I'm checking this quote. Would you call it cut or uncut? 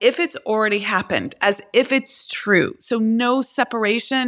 uncut